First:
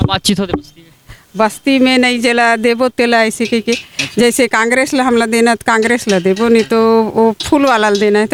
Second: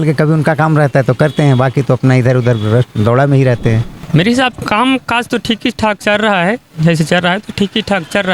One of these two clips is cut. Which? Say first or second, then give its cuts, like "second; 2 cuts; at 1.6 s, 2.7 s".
second; 1 cut; at 3.9 s